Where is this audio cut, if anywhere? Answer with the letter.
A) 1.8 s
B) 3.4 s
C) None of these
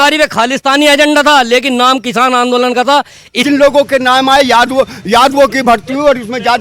B